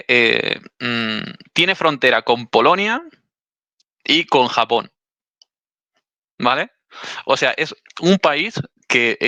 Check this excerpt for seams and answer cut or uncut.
uncut